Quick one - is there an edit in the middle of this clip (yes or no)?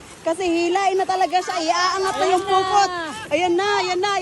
no